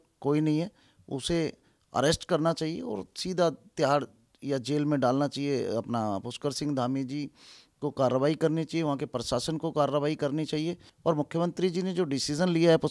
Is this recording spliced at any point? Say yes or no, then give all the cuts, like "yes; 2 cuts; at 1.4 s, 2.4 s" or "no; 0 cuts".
yes; 1 cut; at 10.9 s